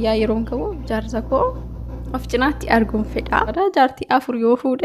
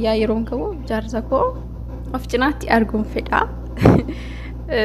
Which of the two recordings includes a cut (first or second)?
first